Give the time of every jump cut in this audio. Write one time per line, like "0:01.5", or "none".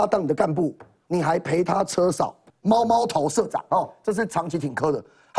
0:02.4